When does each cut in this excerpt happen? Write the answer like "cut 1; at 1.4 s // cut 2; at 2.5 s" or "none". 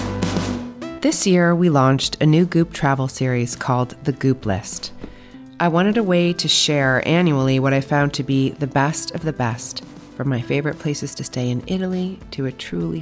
cut 1; at 0.9 s